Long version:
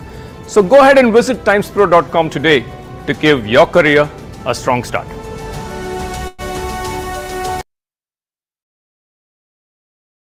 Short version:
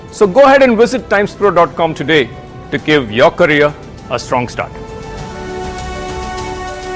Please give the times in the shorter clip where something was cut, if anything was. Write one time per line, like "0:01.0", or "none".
0:05.9